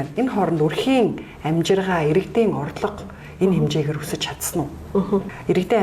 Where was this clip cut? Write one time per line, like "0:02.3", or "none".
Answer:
none